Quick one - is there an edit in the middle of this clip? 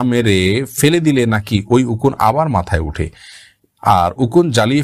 no; 0 cuts

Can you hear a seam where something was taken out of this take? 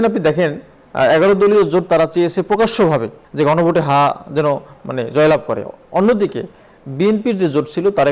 yes; 1 cut; at 3.2 s

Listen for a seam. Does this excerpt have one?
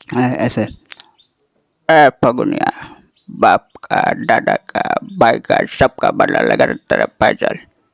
no; 0 cuts

